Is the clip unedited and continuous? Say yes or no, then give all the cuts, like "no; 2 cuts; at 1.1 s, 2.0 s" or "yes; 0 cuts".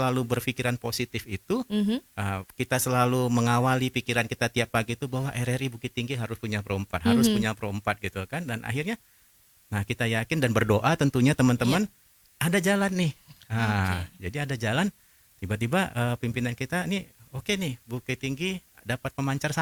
yes; 0 cuts